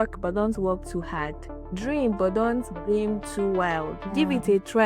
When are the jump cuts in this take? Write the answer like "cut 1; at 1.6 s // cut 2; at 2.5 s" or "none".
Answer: none